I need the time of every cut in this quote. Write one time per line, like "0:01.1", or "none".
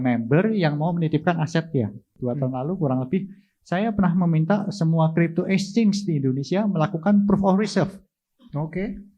0:02.1